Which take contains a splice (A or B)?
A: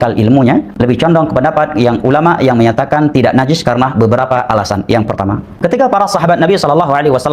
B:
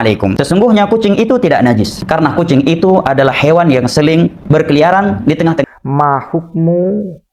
B